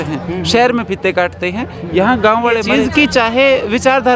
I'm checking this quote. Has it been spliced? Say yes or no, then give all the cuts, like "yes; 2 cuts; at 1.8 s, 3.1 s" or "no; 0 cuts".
yes; 1 cut; at 2.6 s